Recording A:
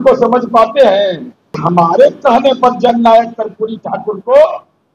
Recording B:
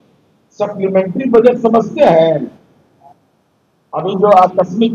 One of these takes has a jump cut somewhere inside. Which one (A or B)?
A